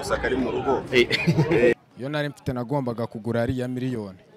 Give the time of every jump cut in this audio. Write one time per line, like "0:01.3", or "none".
0:01.7